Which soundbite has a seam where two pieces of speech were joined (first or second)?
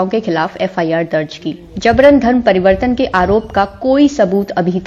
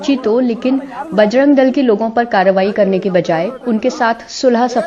first